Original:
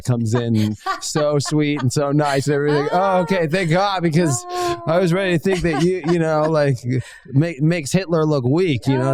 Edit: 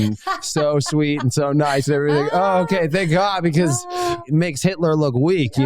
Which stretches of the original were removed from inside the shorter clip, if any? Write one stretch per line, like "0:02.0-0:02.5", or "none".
0:04.8-0:07.5